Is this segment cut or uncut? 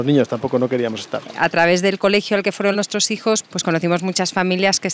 cut